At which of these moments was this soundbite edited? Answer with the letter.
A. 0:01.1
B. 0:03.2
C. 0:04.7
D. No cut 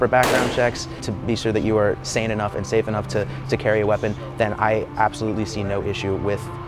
A